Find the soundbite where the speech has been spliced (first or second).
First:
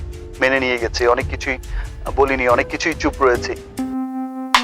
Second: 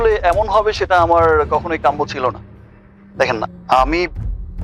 first